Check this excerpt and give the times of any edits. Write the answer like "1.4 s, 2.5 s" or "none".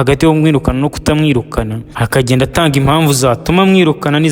1.8 s